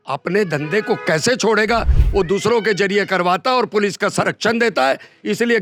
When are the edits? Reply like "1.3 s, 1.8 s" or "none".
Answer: none